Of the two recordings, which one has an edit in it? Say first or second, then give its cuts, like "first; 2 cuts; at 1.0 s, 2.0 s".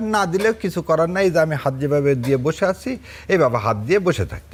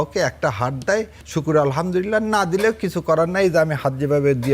second; 1 cut; at 1.2 s